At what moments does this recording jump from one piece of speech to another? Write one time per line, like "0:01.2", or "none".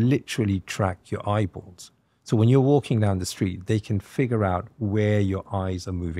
none

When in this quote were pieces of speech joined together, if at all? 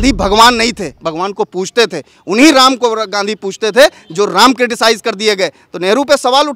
none

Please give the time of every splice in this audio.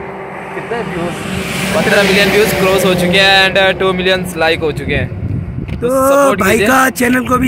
none

